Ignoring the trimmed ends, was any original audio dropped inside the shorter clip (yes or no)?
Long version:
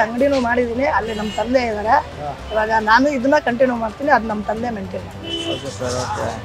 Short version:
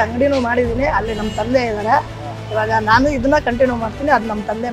no